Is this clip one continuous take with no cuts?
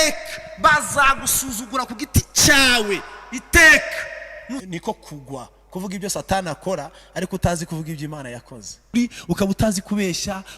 no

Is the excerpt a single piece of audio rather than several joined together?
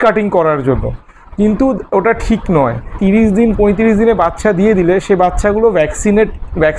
no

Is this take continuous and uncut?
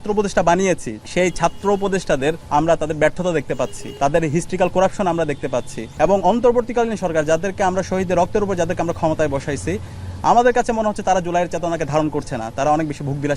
no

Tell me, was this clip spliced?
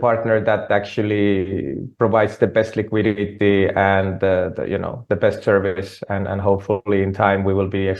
no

